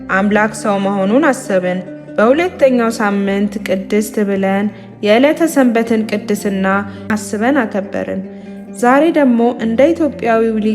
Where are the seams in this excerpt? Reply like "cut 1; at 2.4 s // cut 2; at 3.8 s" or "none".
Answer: cut 1; at 7.1 s

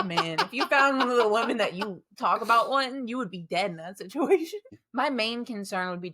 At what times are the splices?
cut 1; at 4.7 s

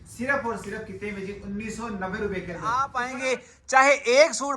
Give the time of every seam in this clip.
cut 1; at 3.0 s

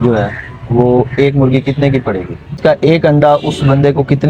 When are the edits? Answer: cut 1; at 2.6 s

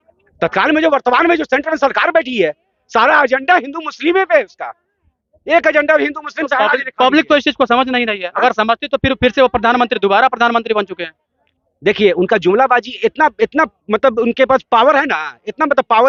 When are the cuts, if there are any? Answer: none

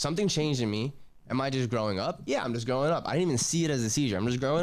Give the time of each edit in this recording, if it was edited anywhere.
none

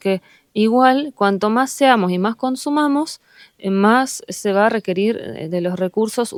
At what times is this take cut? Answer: none

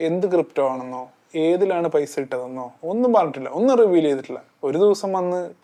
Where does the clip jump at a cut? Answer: none

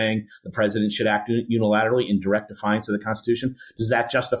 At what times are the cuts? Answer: none

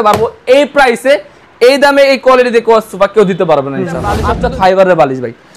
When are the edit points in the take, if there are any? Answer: cut 1; at 4.3 s

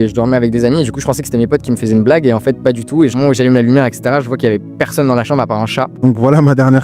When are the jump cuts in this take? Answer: cut 1; at 3.1 s // cut 2; at 5.9 s

